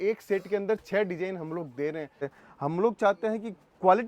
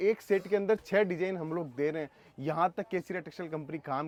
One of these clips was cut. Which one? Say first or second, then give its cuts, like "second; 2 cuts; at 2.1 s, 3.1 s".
first; 1 cut; at 2.3 s